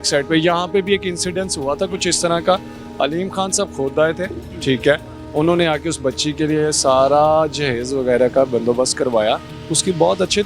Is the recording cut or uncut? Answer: uncut